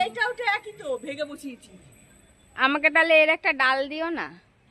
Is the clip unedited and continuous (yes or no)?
yes